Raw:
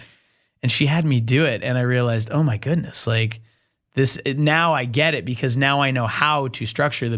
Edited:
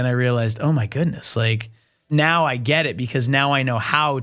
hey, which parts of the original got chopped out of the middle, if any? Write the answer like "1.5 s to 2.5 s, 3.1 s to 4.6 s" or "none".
3.8 s to 4.4 s